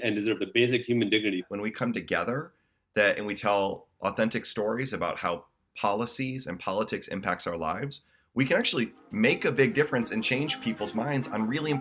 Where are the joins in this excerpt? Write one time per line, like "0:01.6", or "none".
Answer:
0:01.4